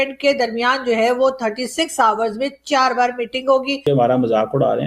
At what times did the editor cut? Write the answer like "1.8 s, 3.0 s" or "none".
3.8 s